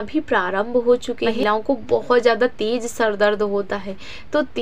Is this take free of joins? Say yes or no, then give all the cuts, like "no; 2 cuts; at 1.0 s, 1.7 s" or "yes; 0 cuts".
no; 1 cut; at 1.4 s